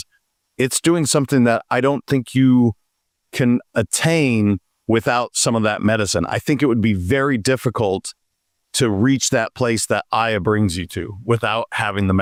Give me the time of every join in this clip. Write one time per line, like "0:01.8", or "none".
none